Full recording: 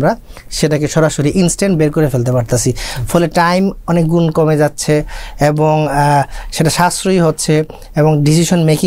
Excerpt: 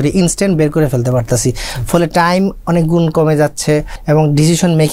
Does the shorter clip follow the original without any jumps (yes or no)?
no